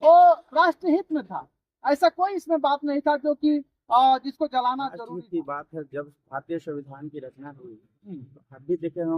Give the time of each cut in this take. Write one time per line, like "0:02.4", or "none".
0:05.0